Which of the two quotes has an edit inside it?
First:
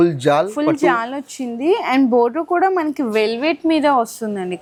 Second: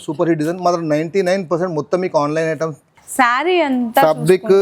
second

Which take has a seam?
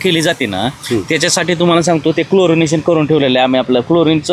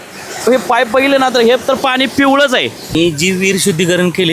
second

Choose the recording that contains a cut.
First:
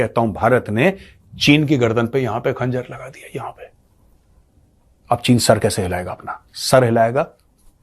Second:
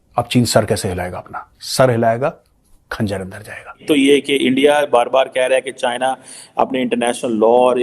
second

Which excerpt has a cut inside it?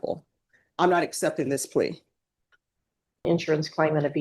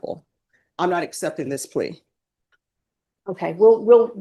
first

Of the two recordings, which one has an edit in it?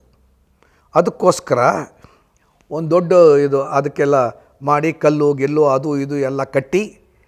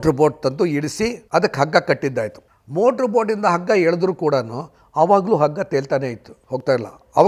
second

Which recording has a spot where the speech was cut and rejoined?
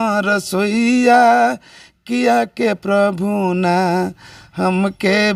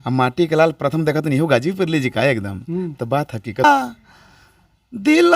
second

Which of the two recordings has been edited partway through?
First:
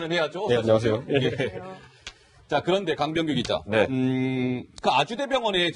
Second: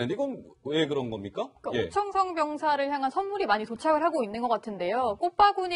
first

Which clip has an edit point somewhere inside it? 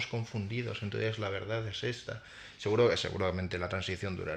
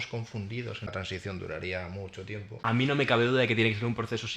second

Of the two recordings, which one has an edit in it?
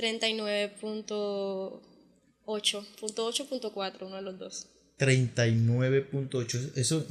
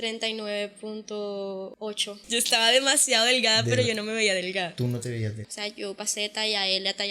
second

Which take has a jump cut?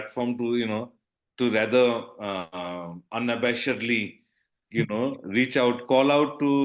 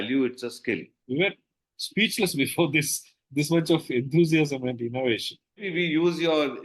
second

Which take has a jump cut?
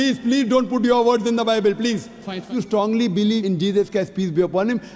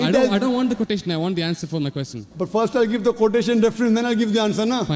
first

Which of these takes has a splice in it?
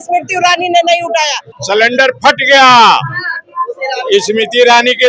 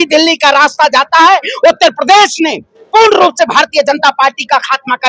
first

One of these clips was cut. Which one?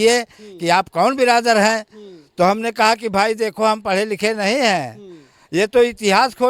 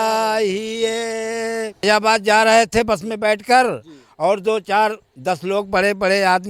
second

